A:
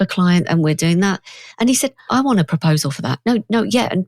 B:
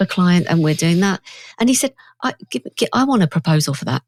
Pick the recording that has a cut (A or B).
A